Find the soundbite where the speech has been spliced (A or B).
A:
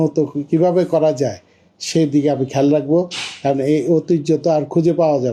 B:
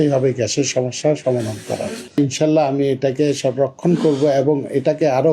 B